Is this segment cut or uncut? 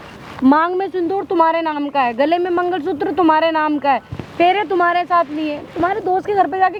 uncut